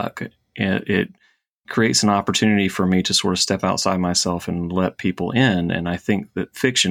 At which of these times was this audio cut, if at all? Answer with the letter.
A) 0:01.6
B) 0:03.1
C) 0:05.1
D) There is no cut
D